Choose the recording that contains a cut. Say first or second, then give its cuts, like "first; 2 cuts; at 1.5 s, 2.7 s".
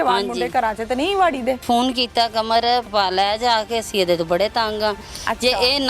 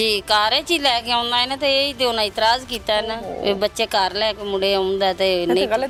first; 2 cuts; at 1.6 s, 2.9 s